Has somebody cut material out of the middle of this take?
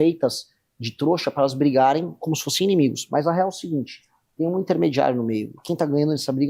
no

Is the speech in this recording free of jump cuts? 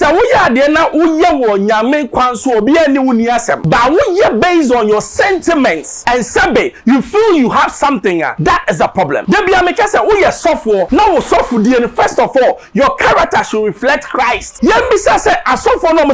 no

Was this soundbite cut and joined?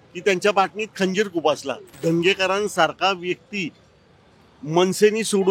yes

